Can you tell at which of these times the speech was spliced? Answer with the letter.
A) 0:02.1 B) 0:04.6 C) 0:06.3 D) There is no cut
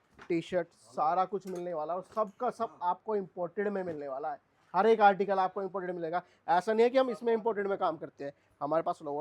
D